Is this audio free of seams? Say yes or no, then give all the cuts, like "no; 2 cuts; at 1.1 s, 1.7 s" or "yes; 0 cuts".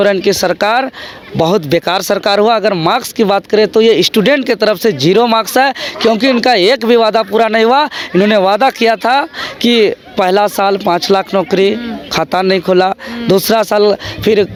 yes; 0 cuts